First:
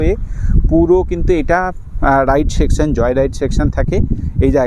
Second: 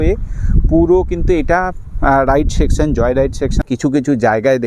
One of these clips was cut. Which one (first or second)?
second